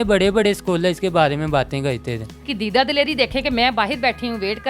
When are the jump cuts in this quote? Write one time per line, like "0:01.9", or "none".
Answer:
0:02.5

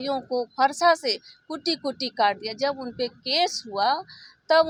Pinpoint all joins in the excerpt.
none

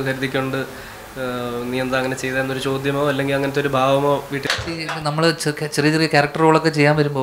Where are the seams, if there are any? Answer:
0:04.9

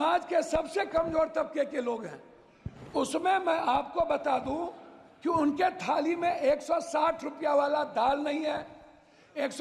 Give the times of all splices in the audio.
none

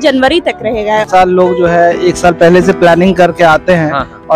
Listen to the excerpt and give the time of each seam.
0:01.1

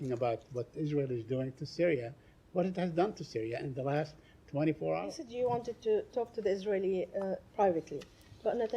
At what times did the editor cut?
0:05.2

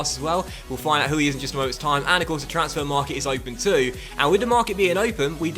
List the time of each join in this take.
none

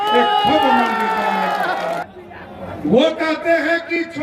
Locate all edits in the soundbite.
0:02.0

